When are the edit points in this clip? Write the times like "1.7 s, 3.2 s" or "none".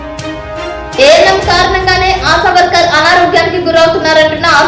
none

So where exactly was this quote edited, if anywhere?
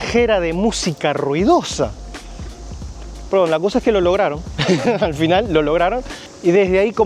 none

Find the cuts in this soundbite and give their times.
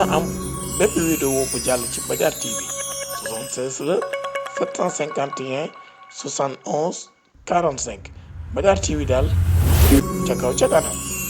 10.0 s

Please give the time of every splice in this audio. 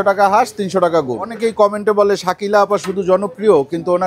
1.3 s

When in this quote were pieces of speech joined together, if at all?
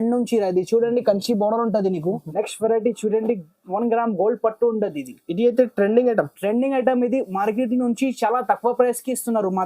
2.2 s

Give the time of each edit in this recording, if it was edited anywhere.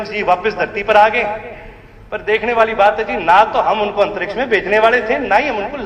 none

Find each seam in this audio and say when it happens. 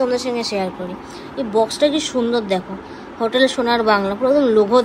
none

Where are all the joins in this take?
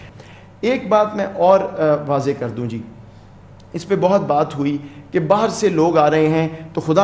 none

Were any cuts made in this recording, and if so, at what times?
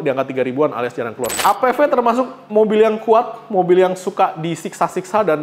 1.3 s

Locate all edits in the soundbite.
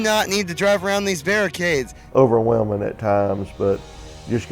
1.9 s

